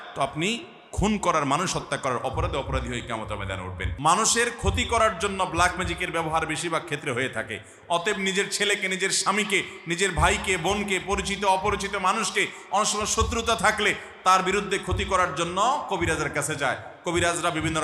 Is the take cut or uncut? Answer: cut